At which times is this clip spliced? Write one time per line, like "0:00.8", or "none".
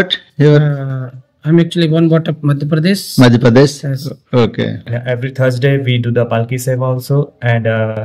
0:04.9